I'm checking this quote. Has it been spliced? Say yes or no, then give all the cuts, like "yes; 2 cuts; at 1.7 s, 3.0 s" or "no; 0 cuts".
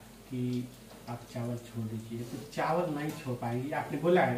no; 0 cuts